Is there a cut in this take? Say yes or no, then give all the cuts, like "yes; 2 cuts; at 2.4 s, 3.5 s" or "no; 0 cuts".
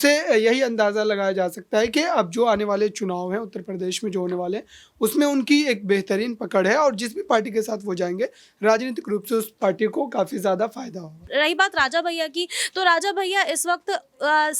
yes; 1 cut; at 11.3 s